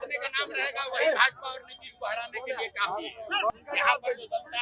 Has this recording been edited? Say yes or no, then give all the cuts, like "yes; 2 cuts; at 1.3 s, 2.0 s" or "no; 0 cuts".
yes; 1 cut; at 3.5 s